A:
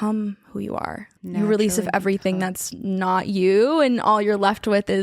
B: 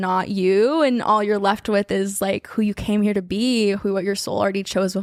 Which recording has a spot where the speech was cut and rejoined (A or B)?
A